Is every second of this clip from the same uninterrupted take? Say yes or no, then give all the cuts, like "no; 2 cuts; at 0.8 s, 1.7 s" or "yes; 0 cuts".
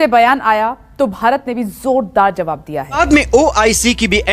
no; 1 cut; at 3.0 s